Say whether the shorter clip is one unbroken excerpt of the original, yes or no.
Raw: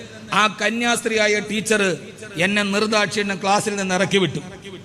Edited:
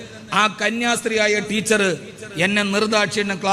yes